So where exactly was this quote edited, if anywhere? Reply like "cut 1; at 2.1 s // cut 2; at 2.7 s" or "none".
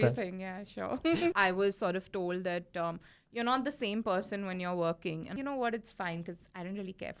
cut 1; at 1.3 s // cut 2; at 5.3 s